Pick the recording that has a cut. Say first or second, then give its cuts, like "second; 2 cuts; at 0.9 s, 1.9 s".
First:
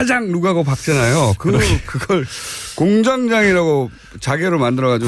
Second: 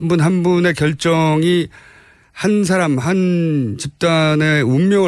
first; 1 cut; at 1.7 s